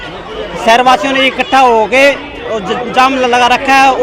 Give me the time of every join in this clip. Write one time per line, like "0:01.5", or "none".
none

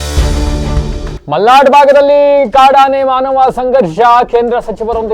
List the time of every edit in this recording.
0:01.1

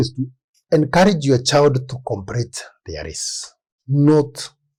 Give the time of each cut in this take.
none

